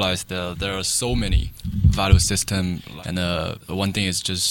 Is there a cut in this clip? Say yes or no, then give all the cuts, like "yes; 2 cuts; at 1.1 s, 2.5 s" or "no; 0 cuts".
yes; 3 cuts; at 1.5 s, 2.8 s, 3.6 s